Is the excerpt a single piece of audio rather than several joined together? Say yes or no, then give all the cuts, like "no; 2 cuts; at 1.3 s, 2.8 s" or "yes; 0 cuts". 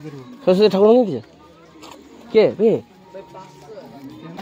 yes; 0 cuts